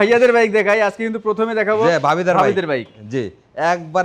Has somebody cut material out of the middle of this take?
no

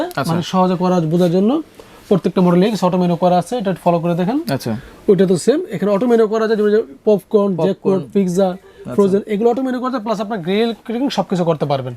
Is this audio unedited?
yes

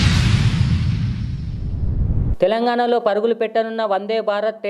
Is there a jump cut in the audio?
yes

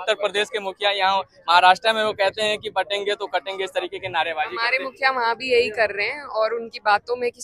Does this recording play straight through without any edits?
yes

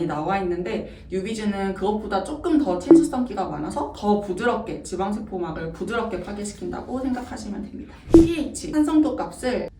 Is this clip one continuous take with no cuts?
no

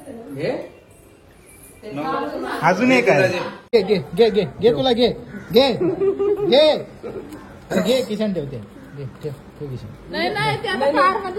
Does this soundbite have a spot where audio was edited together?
yes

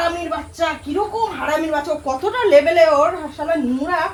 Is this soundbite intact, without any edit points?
yes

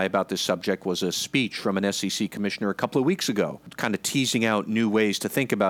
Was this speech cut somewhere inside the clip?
yes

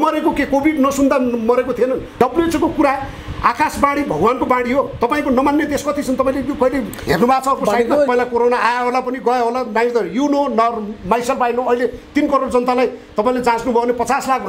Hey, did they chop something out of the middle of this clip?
yes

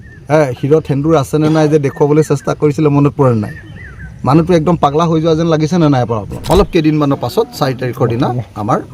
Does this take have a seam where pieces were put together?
yes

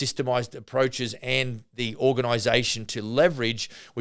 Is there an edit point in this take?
no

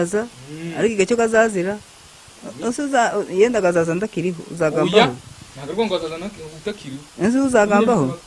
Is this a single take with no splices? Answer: yes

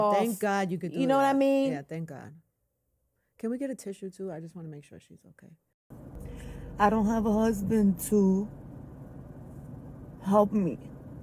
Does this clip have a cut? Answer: yes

